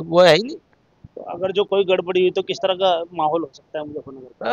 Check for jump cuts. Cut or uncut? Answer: uncut